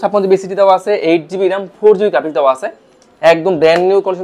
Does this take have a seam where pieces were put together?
no; 0 cuts

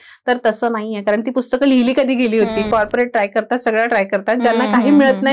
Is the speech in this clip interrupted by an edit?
yes; 1 cut; at 2.7 s

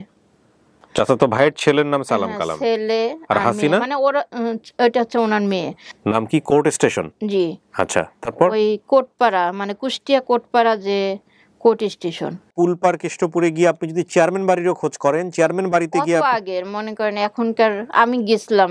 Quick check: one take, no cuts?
no; 2 cuts; at 5.8 s, 12.5 s

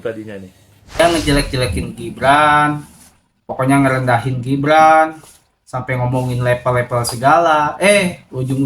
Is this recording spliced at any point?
yes; 1 cut; at 1.0 s

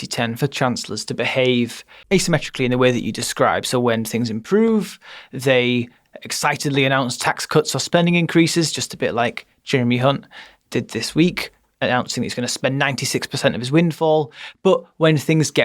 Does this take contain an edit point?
yes; 1 cut; at 2.0 s

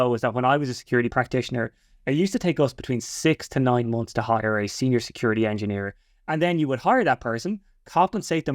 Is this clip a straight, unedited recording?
no; 1 cut; at 1.1 s

